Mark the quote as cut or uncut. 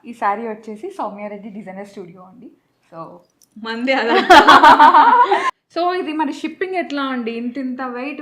cut